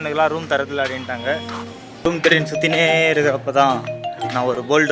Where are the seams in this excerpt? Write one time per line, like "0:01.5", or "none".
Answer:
0:02.0